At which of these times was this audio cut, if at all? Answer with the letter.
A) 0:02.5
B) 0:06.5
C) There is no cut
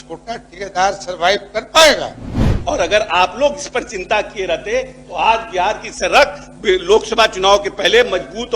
A